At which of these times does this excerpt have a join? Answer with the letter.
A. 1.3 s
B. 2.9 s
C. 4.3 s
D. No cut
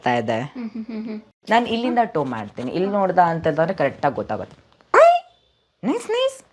A